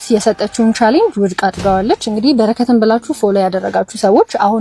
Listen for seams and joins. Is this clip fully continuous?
yes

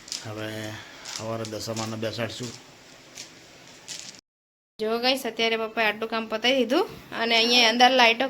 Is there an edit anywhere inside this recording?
yes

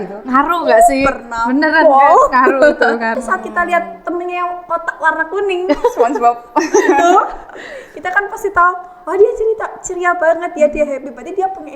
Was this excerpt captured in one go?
no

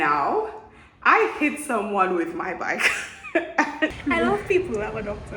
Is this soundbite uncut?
no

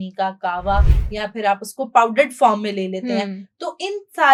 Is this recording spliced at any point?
no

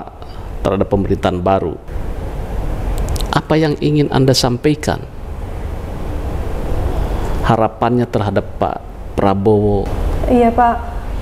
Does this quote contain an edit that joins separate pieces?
yes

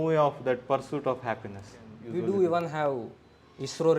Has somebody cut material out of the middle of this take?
yes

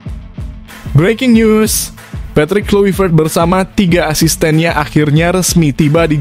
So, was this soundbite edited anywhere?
yes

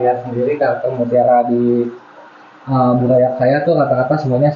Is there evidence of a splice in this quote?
no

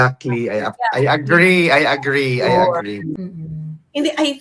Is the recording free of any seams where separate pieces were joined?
no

